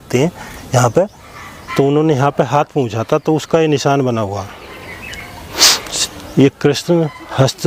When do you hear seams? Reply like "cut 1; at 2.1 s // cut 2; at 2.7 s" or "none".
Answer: none